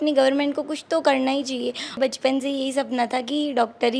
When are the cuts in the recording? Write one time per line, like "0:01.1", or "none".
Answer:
0:02.0